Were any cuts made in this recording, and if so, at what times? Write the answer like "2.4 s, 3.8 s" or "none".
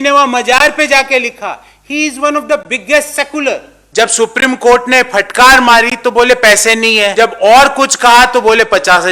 3.7 s, 7.1 s